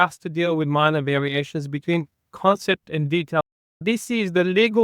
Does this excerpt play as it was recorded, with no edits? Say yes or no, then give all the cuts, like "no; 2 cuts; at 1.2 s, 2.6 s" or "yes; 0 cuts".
no; 1 cut; at 3.6 s